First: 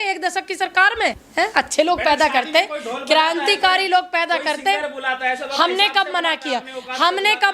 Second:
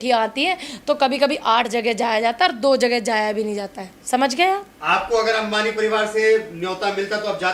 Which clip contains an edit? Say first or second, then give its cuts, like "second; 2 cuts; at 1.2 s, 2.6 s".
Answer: first; 1 cut; at 1.2 s